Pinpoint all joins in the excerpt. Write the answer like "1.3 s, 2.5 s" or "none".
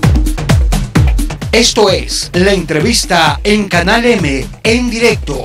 none